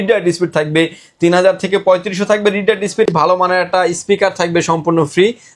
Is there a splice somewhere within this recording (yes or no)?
yes